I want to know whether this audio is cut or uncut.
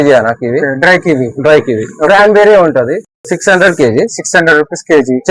uncut